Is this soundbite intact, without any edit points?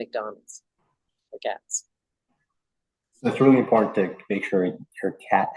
yes; 0 cuts

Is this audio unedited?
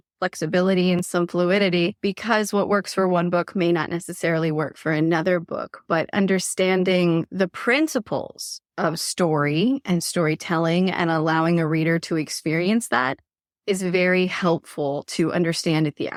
yes; 0 cuts

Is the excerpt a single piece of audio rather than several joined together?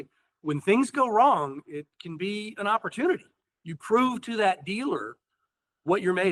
yes; 0 cuts

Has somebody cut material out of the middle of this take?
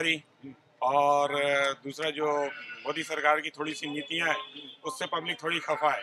no; 0 cuts

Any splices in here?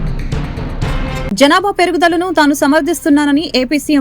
yes; 1 cut; at 1.2 s

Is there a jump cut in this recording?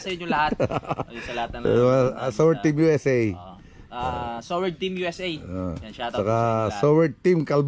no; 0 cuts

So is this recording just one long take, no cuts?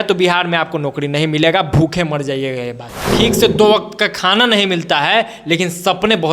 no; 1 cut; at 3.0 s

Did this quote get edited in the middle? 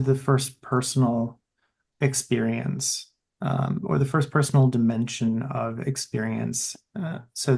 no; 0 cuts

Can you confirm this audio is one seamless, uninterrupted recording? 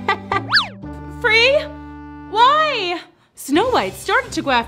yes; 0 cuts

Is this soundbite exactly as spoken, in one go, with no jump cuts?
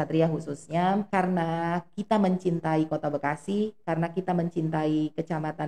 no; 1 cut; at 1.1 s

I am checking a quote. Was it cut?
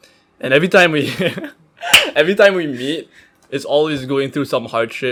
no; 0 cuts

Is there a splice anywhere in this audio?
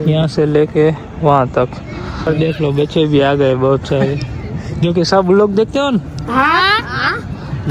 yes; 1 cut; at 2.2 s

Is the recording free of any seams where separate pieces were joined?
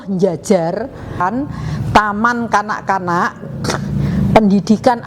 no; 1 cut; at 1.2 s

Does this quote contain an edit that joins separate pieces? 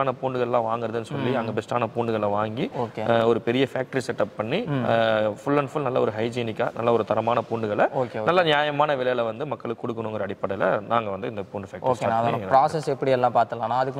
no; 0 cuts

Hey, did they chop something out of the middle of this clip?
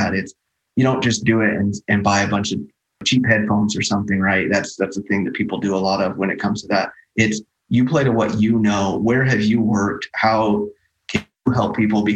yes; 1 cut; at 3.0 s

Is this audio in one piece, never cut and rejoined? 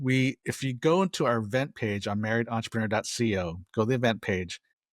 yes; 0 cuts

